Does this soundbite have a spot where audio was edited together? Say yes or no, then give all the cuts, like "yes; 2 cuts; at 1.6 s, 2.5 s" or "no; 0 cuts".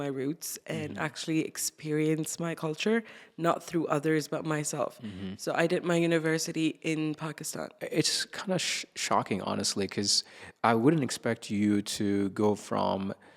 yes; 1 cut; at 7.7 s